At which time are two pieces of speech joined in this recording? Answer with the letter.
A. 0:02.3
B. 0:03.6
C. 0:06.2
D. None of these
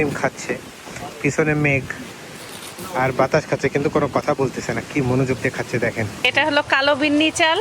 C